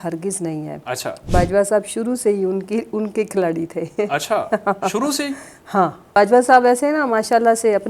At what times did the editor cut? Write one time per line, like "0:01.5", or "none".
0:06.2